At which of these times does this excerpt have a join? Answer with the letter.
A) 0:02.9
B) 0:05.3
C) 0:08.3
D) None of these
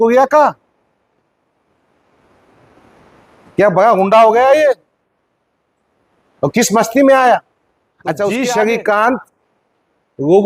C